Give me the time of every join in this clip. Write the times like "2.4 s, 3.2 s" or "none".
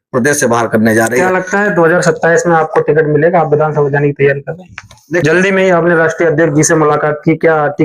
5.2 s